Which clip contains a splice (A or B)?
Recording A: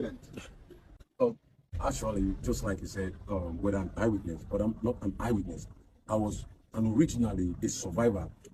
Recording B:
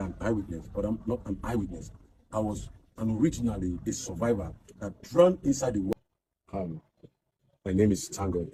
B